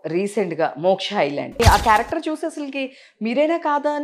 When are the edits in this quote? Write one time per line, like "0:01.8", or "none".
0:01.6